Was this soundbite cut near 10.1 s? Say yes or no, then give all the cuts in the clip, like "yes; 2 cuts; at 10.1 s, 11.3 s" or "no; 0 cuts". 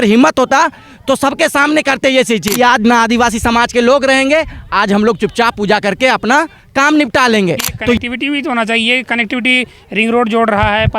no; 2 cuts; at 2.5 s, 8.0 s